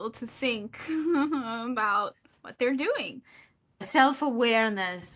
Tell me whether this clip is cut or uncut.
cut